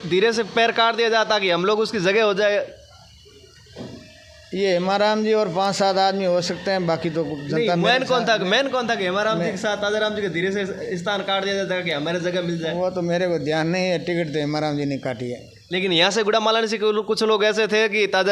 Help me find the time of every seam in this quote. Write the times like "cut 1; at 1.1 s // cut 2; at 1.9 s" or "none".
none